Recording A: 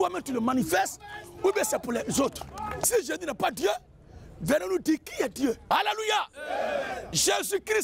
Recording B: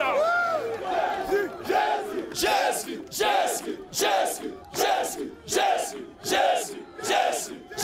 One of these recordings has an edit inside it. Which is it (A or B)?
A